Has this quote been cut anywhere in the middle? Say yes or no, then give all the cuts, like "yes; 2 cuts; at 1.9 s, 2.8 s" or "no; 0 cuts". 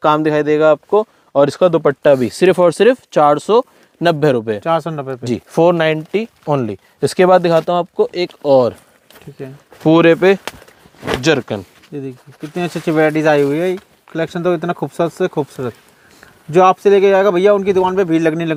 no; 0 cuts